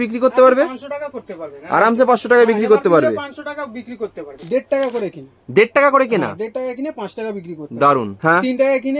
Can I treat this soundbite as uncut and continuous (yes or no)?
no